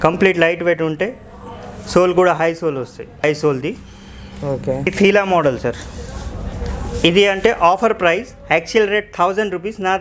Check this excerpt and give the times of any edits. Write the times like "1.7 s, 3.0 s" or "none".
3.2 s, 4.9 s